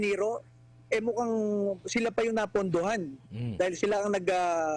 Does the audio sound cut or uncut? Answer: uncut